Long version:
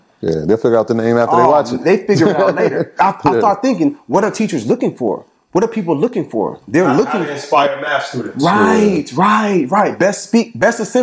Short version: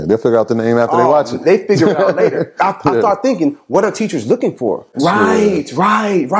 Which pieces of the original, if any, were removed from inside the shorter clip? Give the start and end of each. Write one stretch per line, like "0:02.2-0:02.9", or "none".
0:05.3-0:08.3